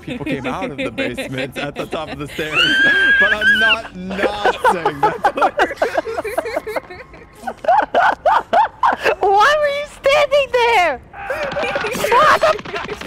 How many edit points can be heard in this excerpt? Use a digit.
0